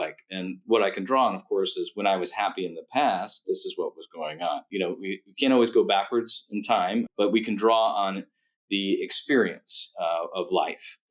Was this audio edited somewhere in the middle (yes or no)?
yes